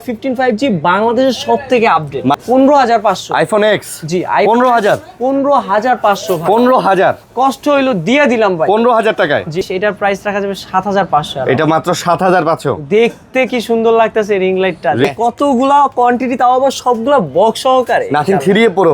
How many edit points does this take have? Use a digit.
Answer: 3